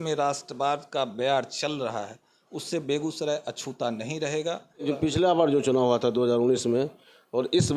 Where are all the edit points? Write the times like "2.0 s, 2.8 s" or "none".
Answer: 4.8 s